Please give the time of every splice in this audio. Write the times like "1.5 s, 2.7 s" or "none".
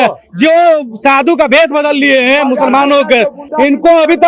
none